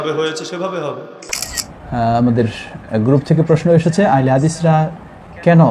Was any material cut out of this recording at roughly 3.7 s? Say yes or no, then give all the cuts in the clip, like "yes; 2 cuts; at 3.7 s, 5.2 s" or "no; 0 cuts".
no; 1 cut; at 1.2 s